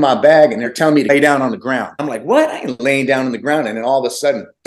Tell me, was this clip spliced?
yes; 2 cuts; at 0.9 s, 1.9 s

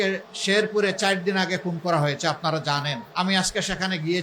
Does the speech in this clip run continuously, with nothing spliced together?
no; 1 cut; at 3.0 s

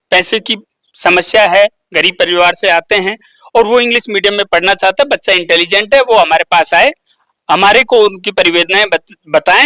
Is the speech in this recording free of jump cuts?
yes; 0 cuts

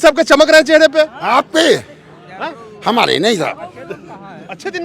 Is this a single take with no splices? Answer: yes; 0 cuts

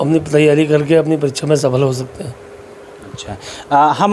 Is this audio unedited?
yes; 0 cuts

